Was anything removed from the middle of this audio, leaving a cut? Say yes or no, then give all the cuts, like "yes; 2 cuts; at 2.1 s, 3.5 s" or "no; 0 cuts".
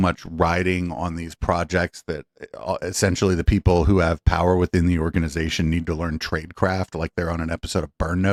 no; 0 cuts